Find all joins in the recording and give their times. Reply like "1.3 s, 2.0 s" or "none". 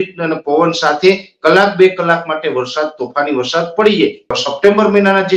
4.4 s